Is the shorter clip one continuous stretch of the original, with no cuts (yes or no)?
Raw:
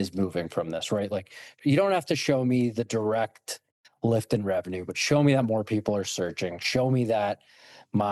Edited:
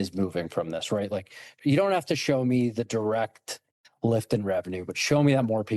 yes